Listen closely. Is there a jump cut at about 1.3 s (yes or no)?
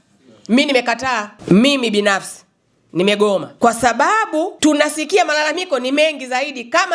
yes